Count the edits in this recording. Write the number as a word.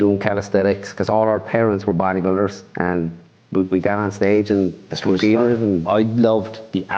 two